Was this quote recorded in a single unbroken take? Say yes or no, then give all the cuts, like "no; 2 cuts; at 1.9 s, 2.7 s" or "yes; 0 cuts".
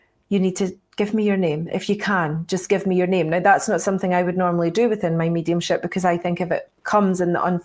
yes; 0 cuts